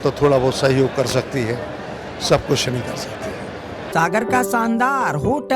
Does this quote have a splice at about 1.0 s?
no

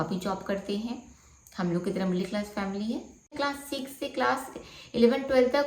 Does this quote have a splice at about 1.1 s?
no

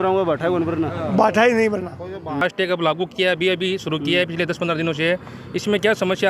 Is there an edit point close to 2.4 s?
yes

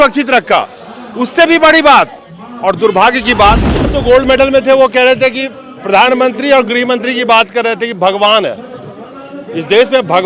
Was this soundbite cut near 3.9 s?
yes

